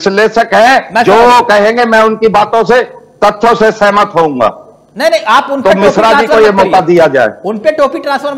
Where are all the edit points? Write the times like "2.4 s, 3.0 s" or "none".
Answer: none